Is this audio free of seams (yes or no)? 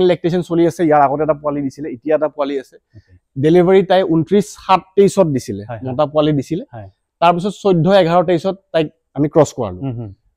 yes